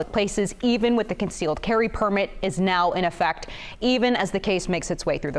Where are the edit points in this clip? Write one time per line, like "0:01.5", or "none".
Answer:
none